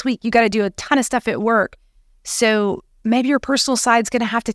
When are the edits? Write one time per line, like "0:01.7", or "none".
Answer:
none